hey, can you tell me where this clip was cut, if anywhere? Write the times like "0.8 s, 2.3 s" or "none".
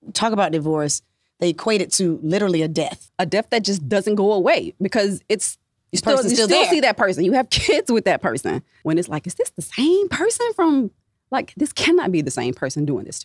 3.0 s, 8.7 s